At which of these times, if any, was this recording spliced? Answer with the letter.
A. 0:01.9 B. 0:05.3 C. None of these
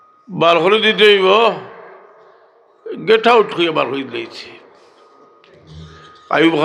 C